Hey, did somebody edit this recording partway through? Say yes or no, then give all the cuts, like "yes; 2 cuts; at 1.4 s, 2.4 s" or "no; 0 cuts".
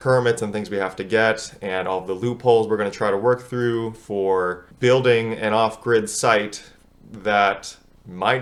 no; 0 cuts